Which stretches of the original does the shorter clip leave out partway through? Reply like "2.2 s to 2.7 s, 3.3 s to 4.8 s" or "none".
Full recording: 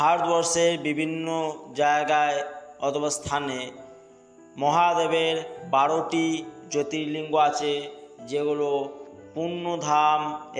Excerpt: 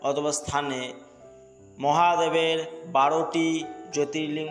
none